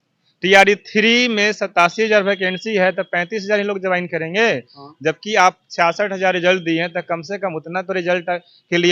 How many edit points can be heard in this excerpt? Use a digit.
0